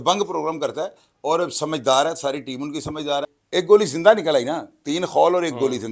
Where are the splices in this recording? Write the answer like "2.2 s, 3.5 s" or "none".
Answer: 3.2 s

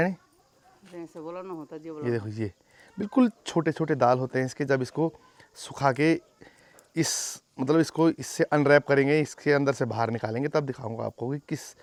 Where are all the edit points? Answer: none

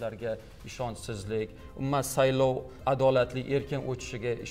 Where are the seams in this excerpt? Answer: 2.8 s

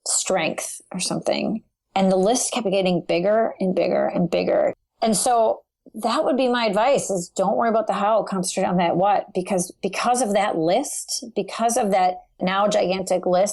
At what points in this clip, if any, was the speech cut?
4.7 s, 12.4 s

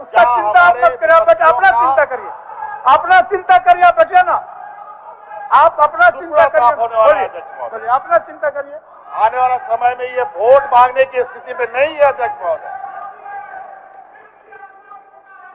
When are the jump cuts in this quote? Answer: none

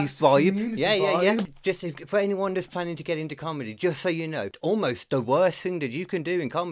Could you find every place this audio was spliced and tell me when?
1.4 s, 4.5 s

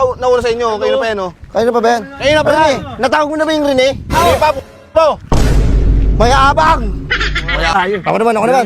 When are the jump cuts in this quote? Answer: 7.7 s

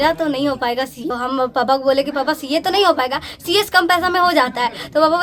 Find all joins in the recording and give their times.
1.0 s

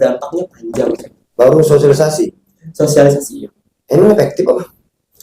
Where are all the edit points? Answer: 1.2 s

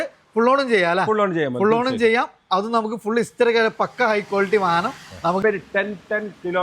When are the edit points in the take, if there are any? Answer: 5.4 s

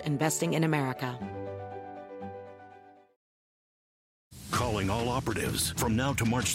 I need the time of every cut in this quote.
1.1 s

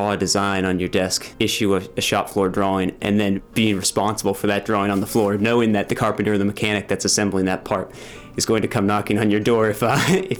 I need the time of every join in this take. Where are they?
1.2 s, 3.5 s, 6.0 s

